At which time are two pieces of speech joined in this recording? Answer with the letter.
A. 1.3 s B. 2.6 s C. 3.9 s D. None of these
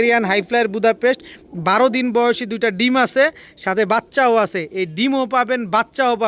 D